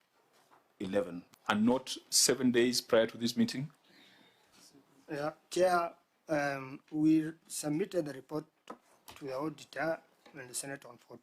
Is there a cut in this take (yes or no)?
yes